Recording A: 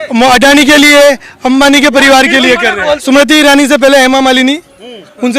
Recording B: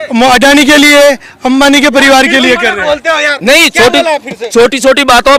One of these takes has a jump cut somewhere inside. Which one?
A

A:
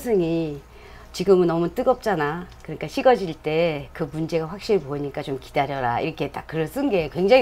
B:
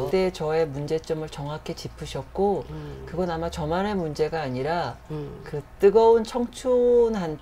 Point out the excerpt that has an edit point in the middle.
A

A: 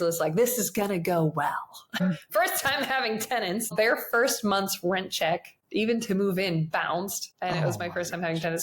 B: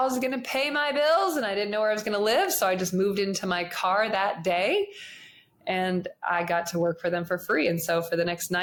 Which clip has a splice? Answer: A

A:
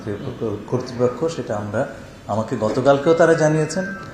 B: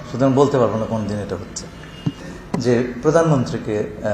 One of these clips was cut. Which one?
B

